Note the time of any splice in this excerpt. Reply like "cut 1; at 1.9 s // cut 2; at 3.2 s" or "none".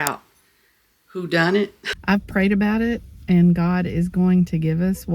cut 1; at 1.9 s